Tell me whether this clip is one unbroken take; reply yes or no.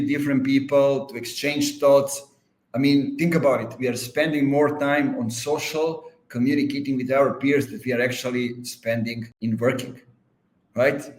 no